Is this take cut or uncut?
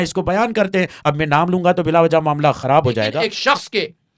cut